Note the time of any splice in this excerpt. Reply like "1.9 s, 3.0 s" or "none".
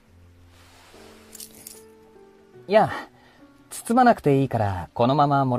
none

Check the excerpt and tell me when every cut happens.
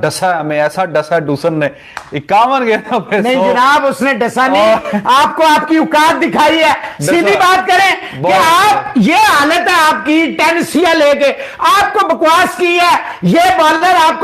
none

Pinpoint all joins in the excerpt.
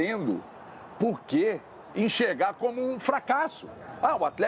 none

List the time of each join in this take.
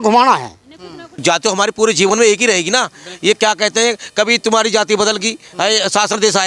1.1 s

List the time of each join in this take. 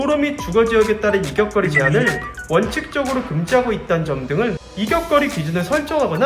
4.6 s

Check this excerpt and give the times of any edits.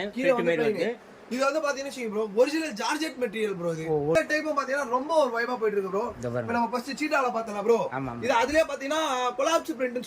4.1 s

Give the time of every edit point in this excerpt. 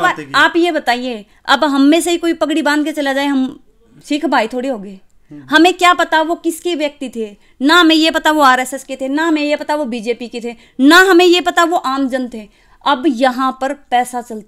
none

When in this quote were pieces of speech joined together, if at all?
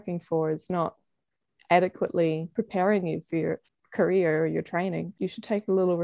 2.5 s, 3.7 s, 5.1 s

